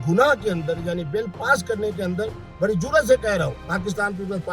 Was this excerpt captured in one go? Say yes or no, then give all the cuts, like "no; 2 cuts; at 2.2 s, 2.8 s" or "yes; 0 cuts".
no; 1 cut; at 3.6 s